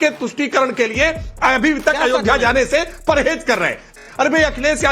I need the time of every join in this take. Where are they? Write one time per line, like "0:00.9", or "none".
0:04.0